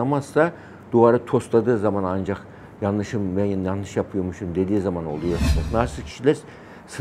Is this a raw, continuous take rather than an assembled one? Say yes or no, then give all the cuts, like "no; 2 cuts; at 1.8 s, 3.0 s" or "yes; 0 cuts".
no; 1 cut; at 5.6 s